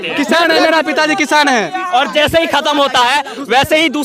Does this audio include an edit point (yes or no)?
yes